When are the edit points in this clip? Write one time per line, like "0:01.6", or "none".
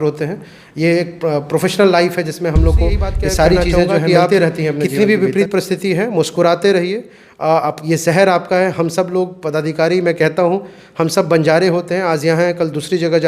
0:04.8